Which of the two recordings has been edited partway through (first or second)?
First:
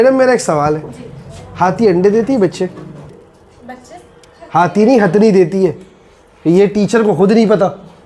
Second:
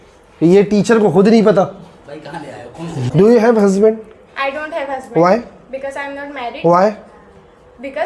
second